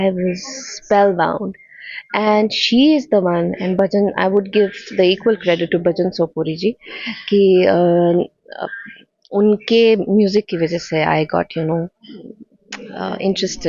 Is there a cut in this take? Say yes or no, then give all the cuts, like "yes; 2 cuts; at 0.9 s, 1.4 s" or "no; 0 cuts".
no; 0 cuts